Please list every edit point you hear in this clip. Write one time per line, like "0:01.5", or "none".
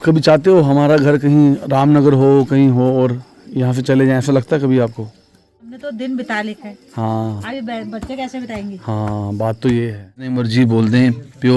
0:05.8
0:10.3

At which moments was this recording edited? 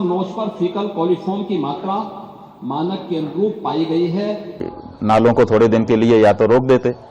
0:04.7

